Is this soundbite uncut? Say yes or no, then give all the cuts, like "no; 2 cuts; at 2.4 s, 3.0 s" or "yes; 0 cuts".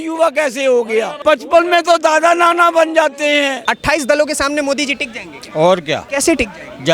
no; 3 cuts; at 1.1 s, 3.7 s, 6.0 s